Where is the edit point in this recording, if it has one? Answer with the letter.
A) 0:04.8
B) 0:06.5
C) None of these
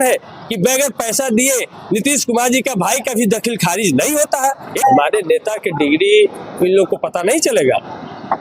A